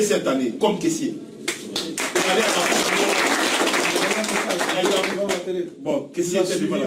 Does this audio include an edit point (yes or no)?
no